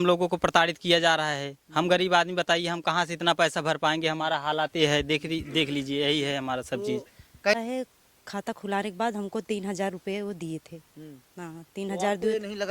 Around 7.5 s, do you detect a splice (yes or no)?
yes